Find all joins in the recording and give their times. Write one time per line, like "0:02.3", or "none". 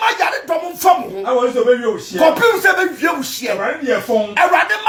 none